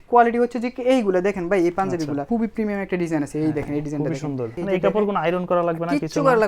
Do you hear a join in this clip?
yes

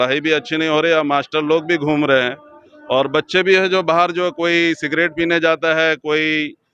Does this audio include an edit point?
no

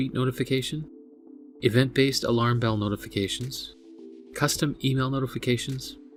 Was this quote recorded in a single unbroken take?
yes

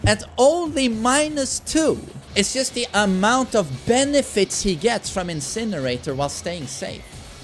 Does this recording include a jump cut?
yes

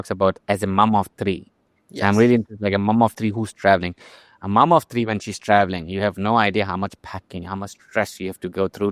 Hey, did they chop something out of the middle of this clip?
no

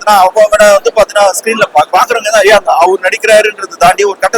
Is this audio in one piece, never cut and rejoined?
no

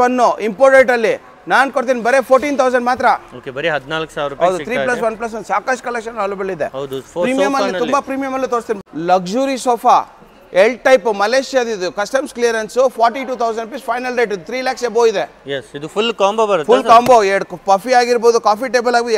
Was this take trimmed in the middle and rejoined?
no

